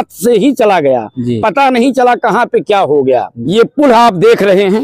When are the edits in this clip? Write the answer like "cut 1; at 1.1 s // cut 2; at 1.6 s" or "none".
cut 1; at 3.4 s